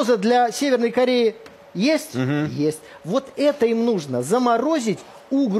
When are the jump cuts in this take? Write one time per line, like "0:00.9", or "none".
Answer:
none